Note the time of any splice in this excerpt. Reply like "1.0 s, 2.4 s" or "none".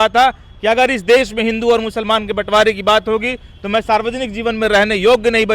none